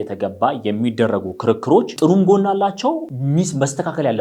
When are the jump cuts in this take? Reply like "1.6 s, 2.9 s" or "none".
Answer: 1.9 s, 3.1 s